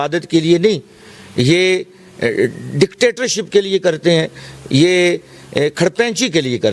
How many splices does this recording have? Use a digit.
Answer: 0